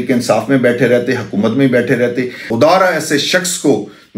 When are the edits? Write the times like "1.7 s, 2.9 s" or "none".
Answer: 2.4 s